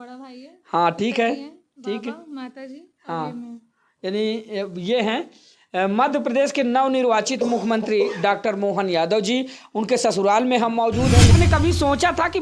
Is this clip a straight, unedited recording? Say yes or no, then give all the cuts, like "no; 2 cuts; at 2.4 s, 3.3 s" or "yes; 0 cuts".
no; 1 cut; at 11.3 s